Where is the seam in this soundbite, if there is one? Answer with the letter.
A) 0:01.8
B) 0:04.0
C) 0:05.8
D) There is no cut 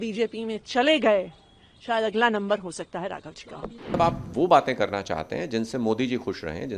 B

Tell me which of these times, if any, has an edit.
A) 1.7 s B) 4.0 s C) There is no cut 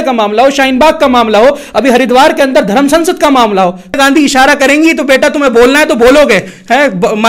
B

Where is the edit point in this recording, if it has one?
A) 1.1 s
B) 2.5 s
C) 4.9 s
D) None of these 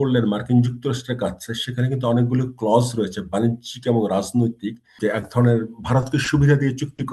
C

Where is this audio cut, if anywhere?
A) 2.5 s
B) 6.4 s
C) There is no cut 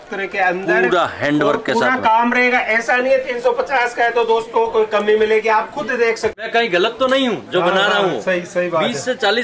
B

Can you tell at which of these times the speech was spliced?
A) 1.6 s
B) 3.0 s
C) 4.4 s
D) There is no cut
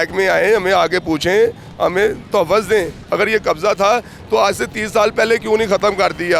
B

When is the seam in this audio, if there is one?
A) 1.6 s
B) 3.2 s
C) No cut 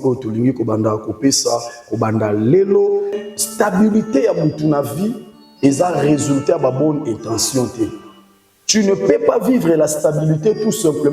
B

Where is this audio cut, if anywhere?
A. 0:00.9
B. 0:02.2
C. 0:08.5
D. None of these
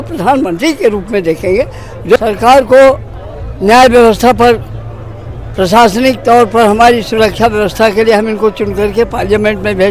B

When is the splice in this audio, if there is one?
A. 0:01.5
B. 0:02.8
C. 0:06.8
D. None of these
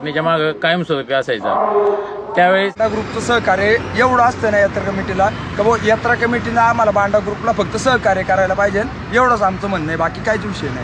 B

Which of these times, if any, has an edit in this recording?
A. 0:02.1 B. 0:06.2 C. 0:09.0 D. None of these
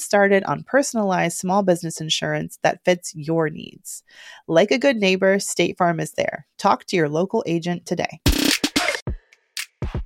C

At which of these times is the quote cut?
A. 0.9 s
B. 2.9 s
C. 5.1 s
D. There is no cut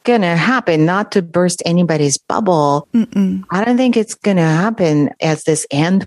C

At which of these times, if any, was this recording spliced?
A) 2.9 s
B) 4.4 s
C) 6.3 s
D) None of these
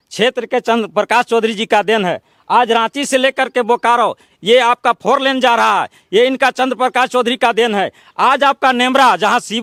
D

